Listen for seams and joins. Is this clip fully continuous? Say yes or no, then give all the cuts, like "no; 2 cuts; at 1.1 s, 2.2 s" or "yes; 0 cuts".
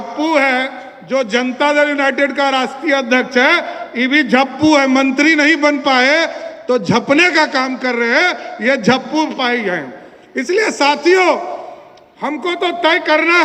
yes; 0 cuts